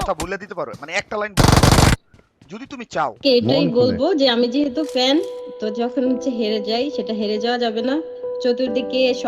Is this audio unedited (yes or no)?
no